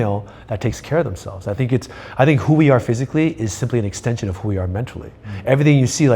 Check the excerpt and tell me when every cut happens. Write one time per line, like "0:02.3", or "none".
none

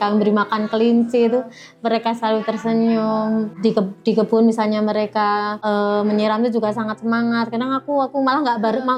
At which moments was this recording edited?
none

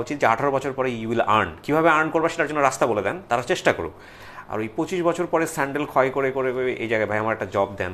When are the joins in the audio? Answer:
none

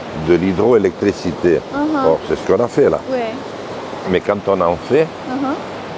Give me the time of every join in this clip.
none

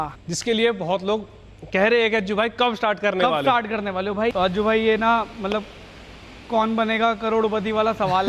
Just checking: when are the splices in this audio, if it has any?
none

